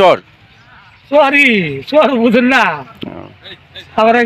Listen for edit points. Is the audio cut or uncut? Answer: uncut